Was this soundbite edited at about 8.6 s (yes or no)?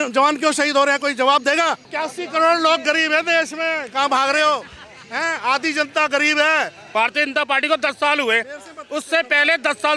no